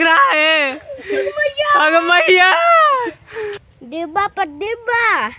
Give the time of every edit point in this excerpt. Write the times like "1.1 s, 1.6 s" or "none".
3.6 s